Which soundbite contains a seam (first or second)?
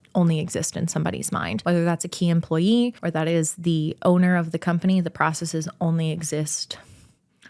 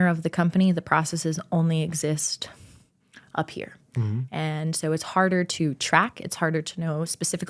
first